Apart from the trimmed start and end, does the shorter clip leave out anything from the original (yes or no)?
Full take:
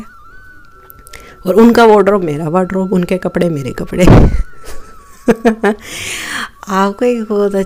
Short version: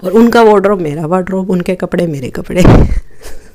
no